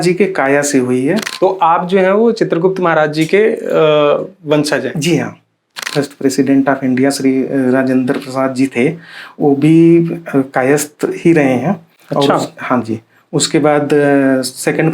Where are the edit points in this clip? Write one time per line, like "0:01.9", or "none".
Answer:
0:01.3
0:05.9